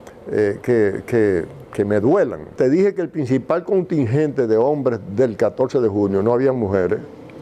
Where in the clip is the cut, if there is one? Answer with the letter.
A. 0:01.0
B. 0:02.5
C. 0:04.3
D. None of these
B